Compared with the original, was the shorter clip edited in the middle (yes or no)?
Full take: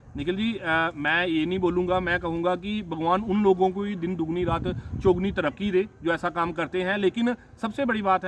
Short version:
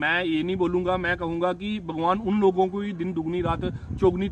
no